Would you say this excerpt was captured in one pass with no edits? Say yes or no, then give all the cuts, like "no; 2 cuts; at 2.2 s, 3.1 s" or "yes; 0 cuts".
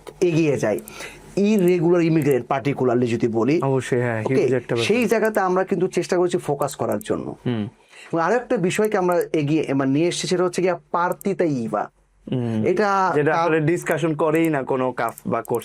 yes; 0 cuts